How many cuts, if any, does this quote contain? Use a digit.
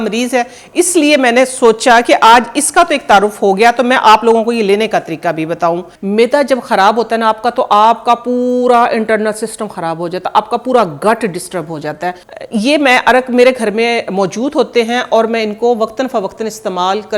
2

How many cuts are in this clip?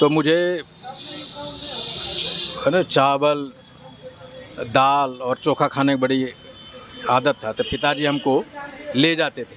0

